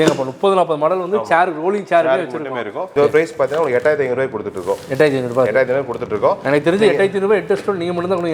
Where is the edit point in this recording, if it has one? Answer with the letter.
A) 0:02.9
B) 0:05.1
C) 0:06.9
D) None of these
A